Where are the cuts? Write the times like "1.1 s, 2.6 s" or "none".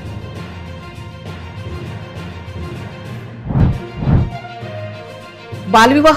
3.3 s